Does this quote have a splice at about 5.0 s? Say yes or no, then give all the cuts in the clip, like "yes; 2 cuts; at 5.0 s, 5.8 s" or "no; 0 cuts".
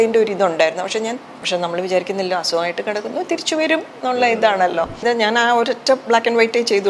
yes; 2 cuts; at 1.3 s, 5.0 s